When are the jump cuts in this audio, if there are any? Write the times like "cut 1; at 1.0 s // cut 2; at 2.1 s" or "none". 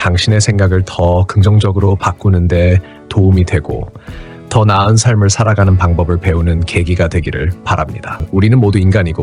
cut 1; at 8.2 s